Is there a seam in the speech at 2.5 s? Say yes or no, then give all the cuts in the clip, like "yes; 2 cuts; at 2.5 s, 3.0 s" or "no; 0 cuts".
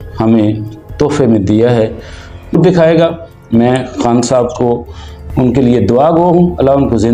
yes; 1 cut; at 2.5 s